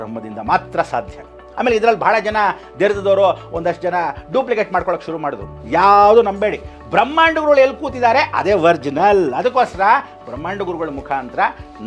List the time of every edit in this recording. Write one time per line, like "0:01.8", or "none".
none